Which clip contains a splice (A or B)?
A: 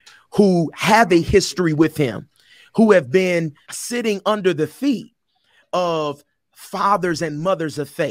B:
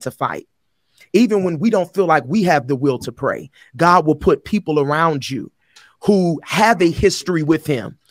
A